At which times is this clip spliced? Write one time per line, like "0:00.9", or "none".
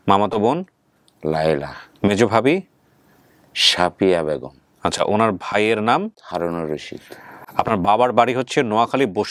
0:06.2